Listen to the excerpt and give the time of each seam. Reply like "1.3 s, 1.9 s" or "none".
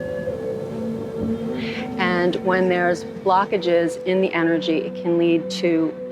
2.0 s

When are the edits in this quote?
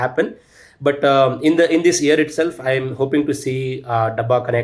none

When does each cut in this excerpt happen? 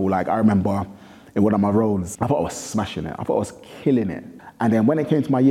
2.1 s, 4.3 s

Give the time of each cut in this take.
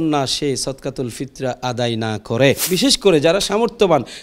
2.7 s

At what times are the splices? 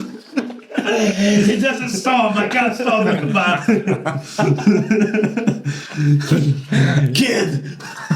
none

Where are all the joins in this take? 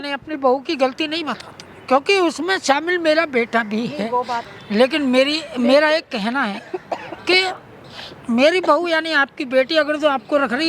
4.5 s

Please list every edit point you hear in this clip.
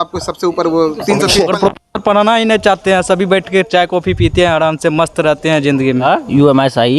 1.5 s, 6.0 s

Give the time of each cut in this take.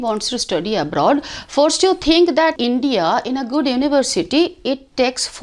2.6 s

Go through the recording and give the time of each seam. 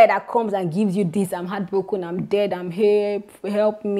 none

